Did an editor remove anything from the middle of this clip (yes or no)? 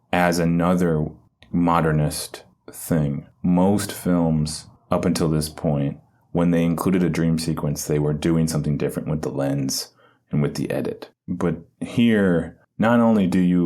yes